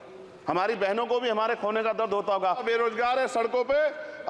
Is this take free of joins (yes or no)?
no